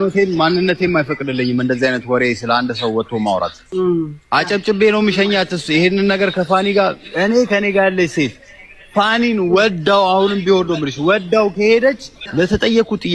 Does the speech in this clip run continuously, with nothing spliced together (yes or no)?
no